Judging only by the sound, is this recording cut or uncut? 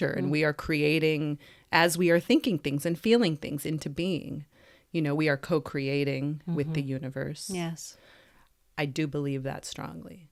uncut